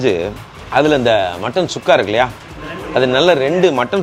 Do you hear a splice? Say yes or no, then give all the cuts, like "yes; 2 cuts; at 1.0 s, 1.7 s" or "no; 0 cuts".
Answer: no; 0 cuts